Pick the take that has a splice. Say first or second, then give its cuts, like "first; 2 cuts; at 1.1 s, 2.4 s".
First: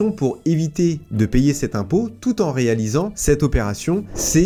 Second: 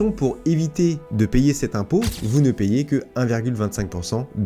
second; 1 cut; at 2.2 s